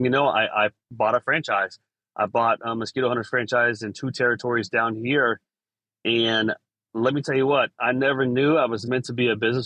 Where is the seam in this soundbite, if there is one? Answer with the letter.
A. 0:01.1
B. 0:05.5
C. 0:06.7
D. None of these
D